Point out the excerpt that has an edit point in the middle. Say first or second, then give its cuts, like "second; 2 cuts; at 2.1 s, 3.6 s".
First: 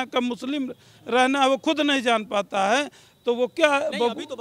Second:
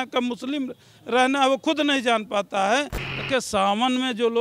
second; 1 cut; at 3.0 s